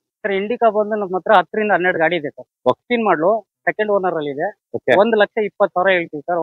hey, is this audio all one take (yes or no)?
no